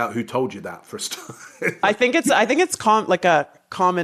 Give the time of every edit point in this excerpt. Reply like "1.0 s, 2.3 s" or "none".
none